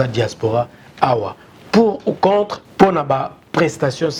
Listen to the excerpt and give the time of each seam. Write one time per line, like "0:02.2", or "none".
0:02.6